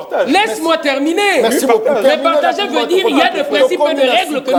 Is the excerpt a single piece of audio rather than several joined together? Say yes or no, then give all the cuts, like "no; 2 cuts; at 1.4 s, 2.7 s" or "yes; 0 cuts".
yes; 0 cuts